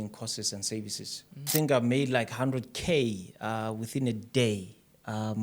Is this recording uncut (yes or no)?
no